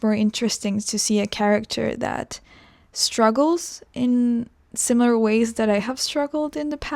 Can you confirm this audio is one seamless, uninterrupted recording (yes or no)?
yes